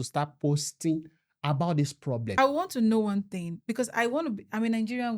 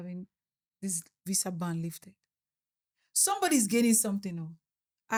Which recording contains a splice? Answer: first; 1 cut; at 2.3 s

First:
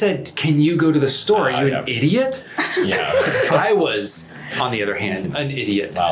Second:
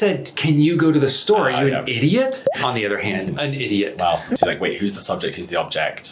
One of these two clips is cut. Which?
second; 2 cuts; at 2.4 s, 4.3 s

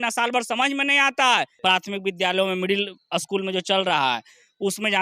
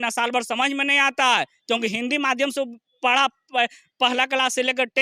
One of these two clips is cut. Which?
first; 1 cut; at 1.5 s

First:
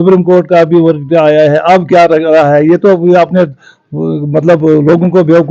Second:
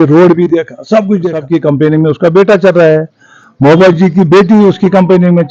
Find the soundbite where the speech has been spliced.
second; 1 cut; at 1.4 s

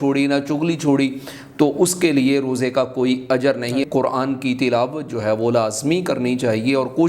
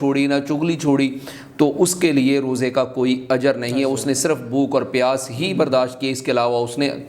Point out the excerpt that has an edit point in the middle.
first; 1 cut; at 3.8 s

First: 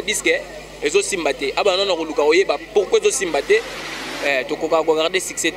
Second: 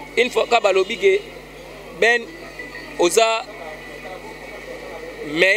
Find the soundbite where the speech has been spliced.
first; 1 cut; at 3.8 s

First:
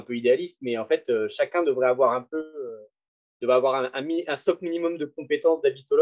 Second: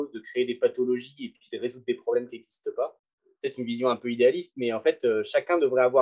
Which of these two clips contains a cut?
second; 1 cut; at 3.0 s

